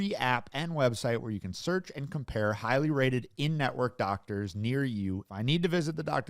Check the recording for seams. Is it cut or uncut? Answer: cut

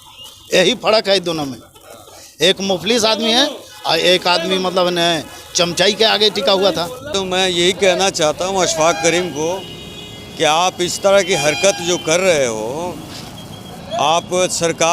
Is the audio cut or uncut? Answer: cut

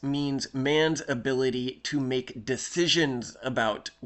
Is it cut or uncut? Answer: uncut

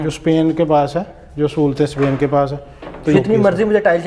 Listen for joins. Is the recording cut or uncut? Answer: cut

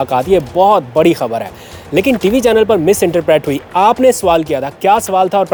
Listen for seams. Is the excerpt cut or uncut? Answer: uncut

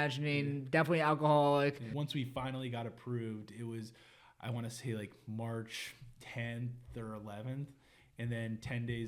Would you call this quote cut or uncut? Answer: cut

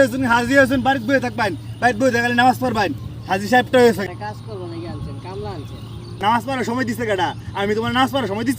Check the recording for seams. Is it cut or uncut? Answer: cut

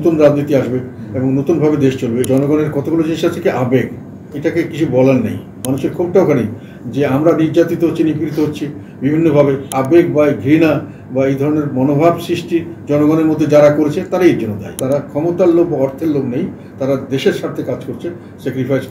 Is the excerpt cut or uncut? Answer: cut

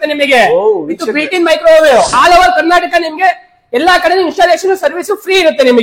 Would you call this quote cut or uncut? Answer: cut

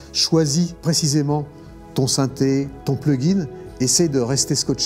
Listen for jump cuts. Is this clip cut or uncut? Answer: cut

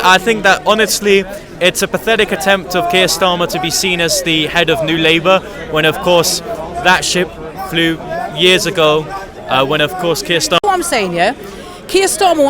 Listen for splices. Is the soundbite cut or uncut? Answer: cut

